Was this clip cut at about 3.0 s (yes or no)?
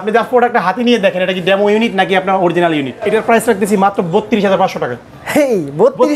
yes